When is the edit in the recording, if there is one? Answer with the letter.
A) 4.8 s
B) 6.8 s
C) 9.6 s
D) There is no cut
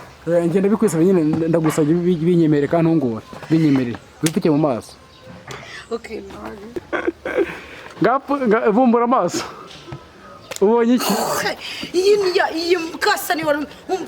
B